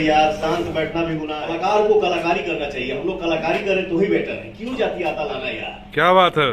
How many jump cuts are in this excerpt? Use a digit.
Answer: 1